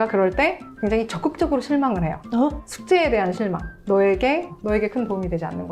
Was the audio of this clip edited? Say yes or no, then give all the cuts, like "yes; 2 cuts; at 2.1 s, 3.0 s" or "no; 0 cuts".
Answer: yes; 2 cuts; at 2.6 s, 3.7 s